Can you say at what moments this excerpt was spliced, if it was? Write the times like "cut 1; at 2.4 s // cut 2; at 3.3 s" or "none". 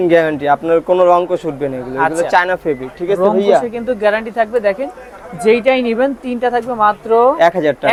none